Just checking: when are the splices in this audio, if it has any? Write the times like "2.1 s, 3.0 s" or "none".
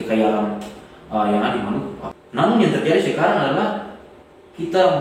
2.0 s